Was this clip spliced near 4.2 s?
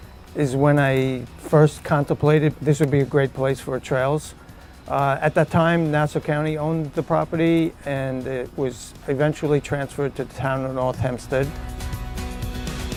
no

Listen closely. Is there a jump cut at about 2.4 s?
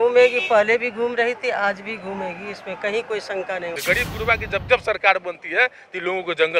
no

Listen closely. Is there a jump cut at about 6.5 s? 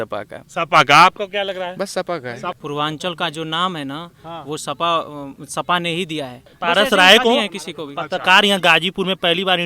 yes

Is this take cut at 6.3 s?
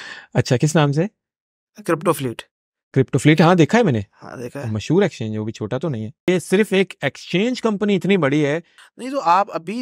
yes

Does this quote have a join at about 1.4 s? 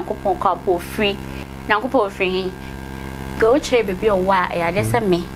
yes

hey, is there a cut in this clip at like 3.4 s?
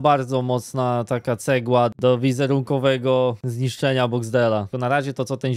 no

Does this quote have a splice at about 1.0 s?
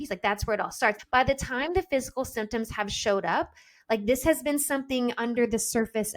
yes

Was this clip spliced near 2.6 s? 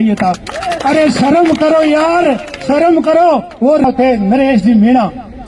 no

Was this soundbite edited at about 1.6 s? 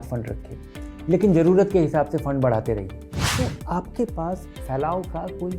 no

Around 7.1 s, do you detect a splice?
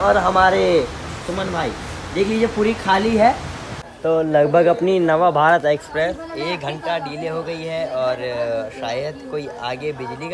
no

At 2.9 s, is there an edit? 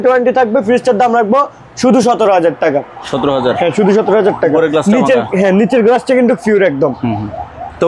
no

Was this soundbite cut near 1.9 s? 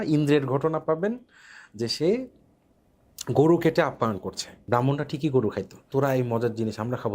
no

